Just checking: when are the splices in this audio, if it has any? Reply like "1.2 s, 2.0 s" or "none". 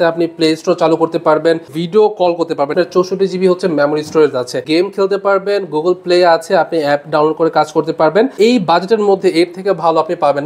1.8 s, 2.7 s, 4.6 s, 8.4 s